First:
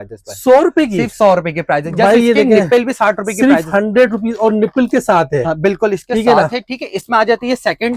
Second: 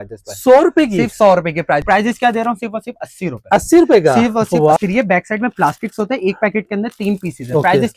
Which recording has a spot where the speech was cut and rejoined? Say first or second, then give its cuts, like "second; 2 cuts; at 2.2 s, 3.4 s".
second; 2 cuts; at 1.8 s, 4.8 s